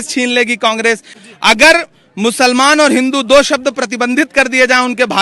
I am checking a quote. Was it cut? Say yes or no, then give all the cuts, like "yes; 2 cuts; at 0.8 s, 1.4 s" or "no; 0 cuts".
yes; 1 cut; at 1.1 s